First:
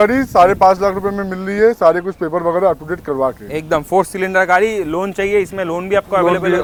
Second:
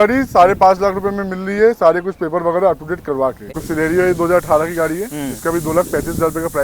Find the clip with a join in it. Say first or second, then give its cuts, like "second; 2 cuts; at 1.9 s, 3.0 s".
second; 1 cut; at 3.6 s